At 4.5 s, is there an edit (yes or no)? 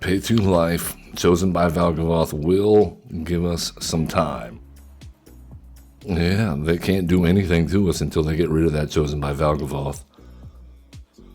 yes